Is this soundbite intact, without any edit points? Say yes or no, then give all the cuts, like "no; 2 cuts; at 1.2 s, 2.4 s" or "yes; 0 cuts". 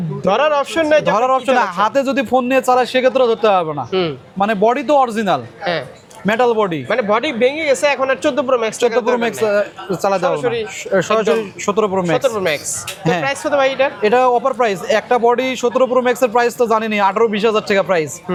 yes; 0 cuts